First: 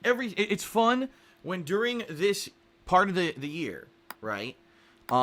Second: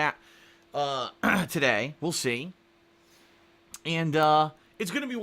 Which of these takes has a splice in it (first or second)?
second